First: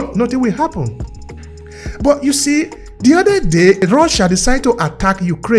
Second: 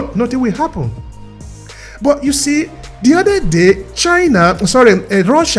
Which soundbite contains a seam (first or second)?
first